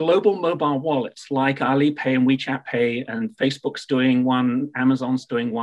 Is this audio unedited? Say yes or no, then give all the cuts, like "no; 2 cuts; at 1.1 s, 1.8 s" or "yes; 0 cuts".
yes; 0 cuts